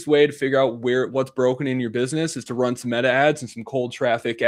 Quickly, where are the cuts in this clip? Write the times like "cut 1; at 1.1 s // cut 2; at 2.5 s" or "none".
none